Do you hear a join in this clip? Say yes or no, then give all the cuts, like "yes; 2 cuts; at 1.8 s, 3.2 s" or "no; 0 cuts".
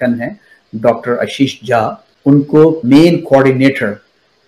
yes; 1 cut; at 2.8 s